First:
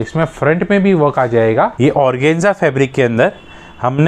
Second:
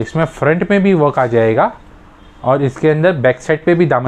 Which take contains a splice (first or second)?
first